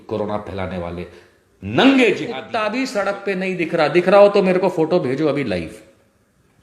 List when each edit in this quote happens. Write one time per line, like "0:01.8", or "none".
0:02.4